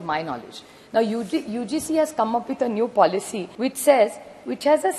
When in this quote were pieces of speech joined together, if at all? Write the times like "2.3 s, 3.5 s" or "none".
3.4 s